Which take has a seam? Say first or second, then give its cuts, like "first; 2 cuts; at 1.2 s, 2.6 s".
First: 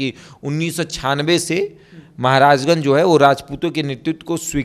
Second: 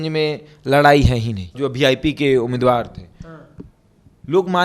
second; 1 cut; at 1.5 s